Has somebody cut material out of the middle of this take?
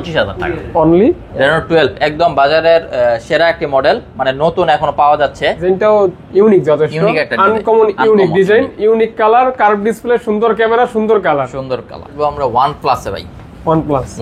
yes; 3 cuts; at 1.3 s, 5.6 s, 12.1 s

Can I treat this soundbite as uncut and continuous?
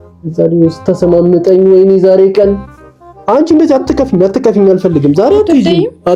yes; 0 cuts

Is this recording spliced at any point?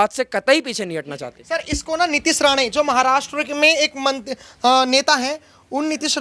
no; 0 cuts

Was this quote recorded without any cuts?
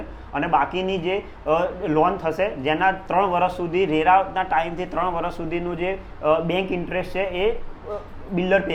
yes; 0 cuts

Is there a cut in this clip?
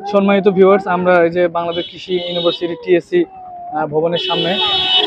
no; 0 cuts

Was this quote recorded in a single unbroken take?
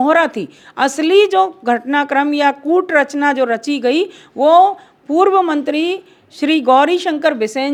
yes; 0 cuts

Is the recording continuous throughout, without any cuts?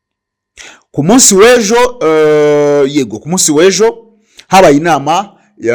yes; 0 cuts

